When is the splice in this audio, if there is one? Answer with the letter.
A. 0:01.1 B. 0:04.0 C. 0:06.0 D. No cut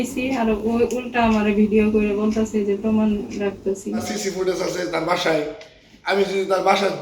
B